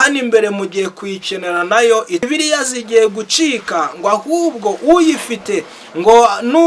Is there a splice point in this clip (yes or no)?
yes